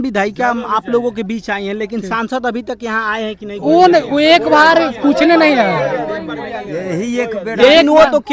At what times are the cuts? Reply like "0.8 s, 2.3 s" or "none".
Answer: none